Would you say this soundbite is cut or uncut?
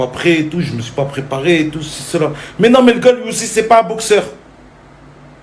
cut